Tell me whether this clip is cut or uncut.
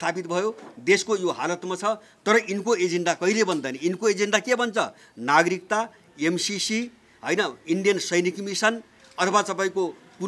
uncut